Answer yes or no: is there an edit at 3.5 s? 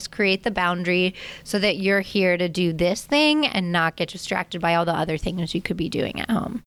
no